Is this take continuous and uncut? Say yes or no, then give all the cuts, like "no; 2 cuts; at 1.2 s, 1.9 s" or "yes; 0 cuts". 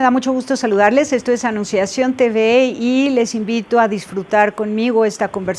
yes; 0 cuts